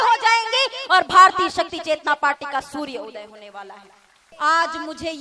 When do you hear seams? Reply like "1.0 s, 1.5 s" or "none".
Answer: 4.3 s